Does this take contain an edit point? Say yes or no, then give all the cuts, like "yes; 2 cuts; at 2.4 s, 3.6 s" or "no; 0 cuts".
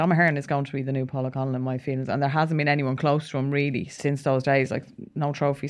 yes; 2 cuts; at 1.1 s, 3.9 s